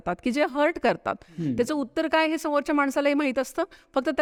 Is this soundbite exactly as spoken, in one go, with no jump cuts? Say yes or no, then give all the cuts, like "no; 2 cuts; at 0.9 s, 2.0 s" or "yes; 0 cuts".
yes; 0 cuts